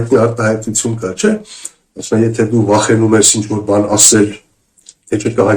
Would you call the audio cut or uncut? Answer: uncut